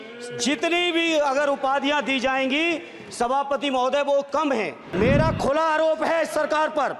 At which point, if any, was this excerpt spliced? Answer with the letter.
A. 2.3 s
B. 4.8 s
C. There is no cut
B